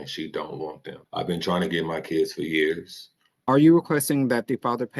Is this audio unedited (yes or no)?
no